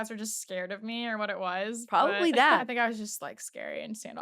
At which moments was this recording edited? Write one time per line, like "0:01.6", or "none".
0:02.6